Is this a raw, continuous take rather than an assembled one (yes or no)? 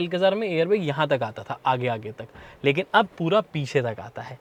yes